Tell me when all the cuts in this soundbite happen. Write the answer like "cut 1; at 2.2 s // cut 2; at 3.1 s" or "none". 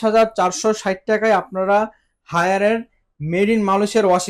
none